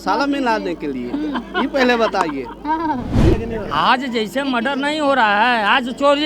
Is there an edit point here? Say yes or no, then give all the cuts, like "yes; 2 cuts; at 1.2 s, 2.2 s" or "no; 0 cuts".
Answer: yes; 1 cut; at 3.3 s